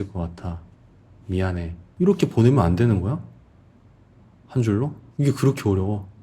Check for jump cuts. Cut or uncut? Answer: cut